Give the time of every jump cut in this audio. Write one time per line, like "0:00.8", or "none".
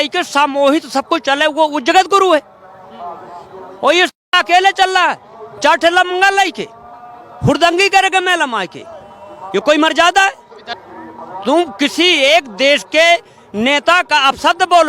0:10.6